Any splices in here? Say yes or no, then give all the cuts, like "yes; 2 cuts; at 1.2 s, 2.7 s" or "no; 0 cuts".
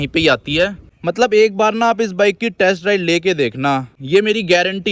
yes; 2 cuts; at 0.9 s, 3.9 s